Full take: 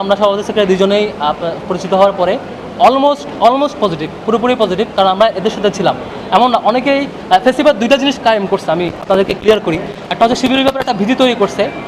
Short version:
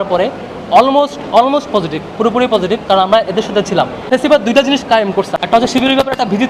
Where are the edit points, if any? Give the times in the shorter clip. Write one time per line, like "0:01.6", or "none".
0:04.1
0:05.3